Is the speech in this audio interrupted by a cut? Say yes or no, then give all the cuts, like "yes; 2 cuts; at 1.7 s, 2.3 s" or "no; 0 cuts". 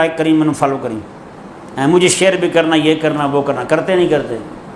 no; 0 cuts